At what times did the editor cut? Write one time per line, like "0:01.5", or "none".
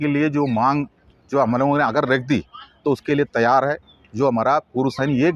none

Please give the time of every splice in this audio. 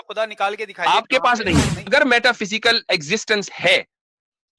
0:01.9

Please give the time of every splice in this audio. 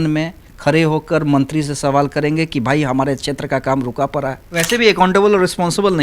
0:04.4

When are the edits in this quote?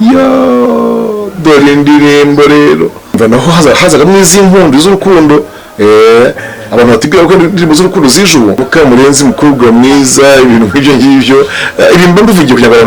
0:03.2
0:08.6

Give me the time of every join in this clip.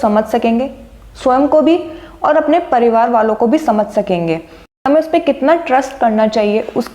0:04.6

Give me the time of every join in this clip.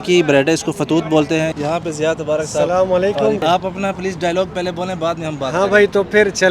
0:01.5
0:03.4

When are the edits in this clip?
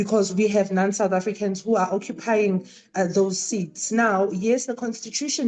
none

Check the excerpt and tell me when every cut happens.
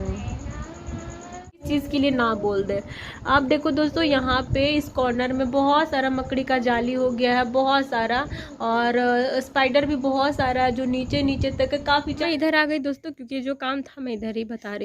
0:01.6
0:12.2

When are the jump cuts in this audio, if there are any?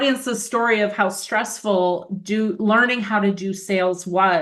none

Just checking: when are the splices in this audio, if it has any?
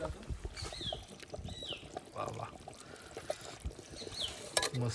none

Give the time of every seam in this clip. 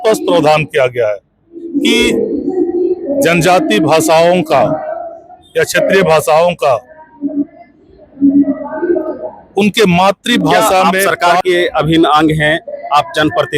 0:03.1
0:11.1

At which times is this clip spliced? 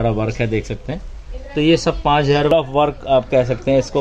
0:02.5

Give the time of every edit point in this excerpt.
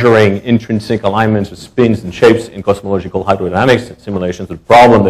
none

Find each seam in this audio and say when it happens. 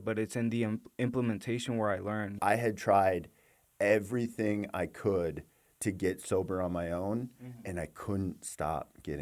0:02.4

